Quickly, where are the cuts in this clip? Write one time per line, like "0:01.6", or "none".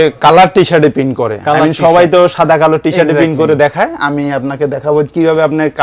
none